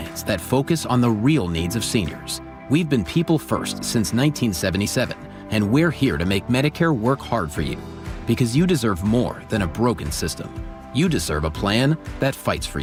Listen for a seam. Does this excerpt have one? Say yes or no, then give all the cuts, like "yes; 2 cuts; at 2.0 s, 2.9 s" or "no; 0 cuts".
no; 0 cuts